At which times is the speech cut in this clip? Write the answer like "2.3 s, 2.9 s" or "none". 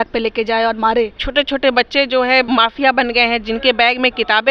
1.2 s